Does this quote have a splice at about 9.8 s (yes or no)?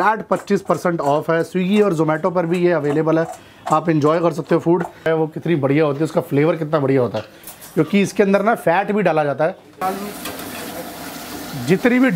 yes